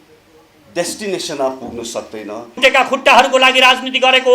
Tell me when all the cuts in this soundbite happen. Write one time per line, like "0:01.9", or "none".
0:02.5